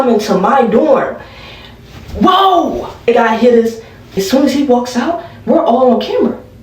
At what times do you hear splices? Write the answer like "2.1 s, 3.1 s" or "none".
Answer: 3.1 s, 4.1 s